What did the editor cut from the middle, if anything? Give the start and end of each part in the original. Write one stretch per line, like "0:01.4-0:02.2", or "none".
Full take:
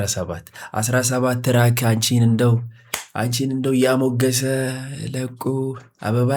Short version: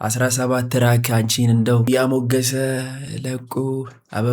0:02.6-0:03.8

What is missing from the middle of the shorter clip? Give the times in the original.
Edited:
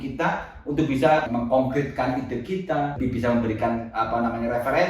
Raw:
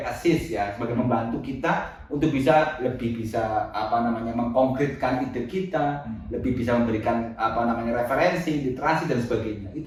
0:02.7-0:04.3
0:06.0-0:06.4

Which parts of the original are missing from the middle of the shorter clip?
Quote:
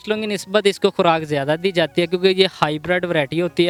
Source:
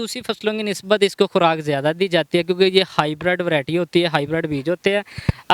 none

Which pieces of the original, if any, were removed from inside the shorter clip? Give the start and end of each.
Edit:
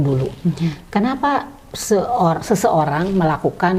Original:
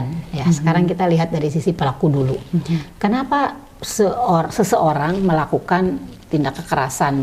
none

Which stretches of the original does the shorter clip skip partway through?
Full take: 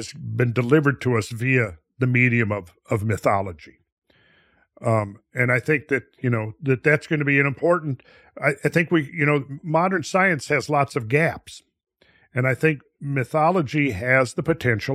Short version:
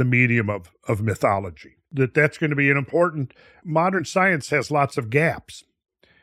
0:03.8-0:06.5
0:08.3-0:09.5

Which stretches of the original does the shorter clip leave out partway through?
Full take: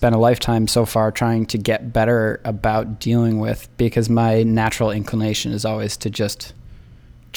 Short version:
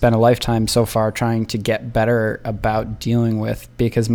none

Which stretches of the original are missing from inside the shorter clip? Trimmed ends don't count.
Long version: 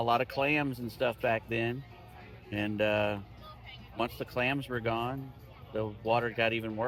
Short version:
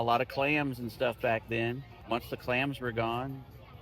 0:01.9-0:03.8

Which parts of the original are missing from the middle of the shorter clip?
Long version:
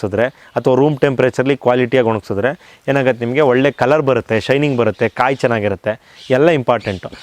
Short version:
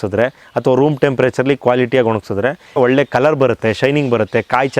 0:02.8-0:03.4

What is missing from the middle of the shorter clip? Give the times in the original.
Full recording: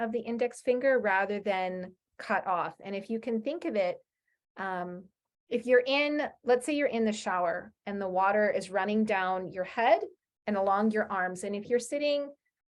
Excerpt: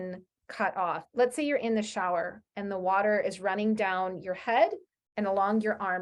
0:02.8-0:06.4

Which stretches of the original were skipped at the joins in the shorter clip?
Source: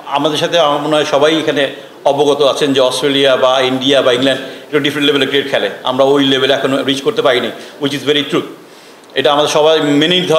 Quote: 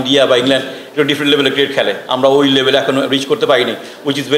none

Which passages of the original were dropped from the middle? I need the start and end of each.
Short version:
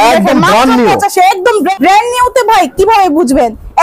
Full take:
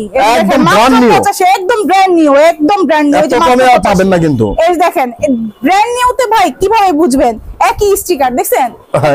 0:01.9-0:05.5

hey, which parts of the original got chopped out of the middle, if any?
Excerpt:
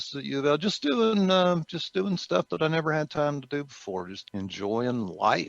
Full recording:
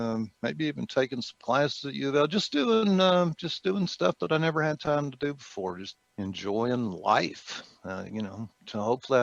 0:05.9-0:06.0

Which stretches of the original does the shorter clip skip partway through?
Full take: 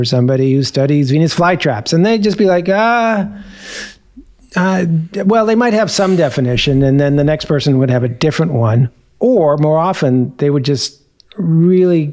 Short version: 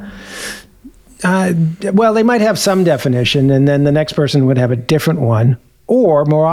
none

